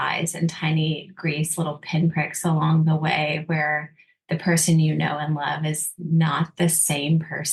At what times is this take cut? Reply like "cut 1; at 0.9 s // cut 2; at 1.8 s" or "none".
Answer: none